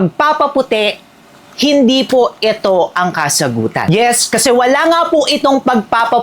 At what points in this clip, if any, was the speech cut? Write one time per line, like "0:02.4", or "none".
none